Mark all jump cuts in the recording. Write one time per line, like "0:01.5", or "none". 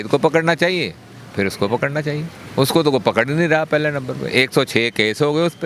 none